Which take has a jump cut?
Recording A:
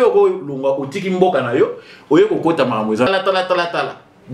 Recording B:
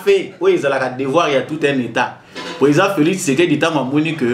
A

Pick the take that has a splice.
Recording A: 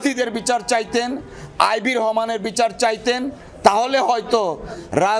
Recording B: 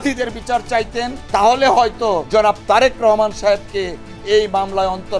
B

